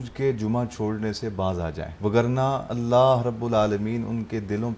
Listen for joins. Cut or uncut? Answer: cut